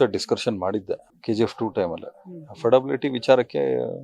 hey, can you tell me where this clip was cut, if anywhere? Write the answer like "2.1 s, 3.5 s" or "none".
1.1 s